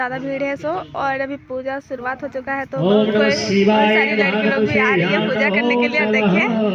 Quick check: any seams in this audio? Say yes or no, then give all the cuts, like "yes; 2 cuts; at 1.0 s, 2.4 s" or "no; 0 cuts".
no; 0 cuts